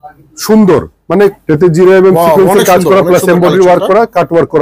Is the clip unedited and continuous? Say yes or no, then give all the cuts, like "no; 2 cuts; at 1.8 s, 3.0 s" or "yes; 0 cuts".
no; 1 cut; at 1.4 s